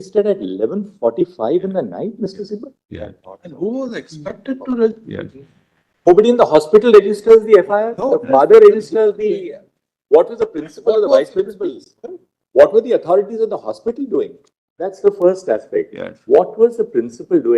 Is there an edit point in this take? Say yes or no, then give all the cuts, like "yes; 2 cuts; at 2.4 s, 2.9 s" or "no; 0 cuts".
yes; 1 cut; at 14.9 s